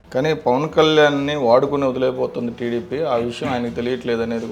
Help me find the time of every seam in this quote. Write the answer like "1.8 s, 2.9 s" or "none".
none